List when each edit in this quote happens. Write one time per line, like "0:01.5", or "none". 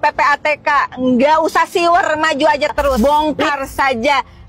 0:03.0